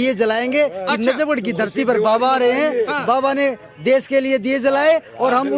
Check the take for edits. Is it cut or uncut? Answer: uncut